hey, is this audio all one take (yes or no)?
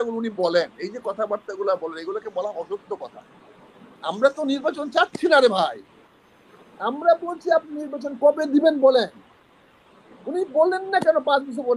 yes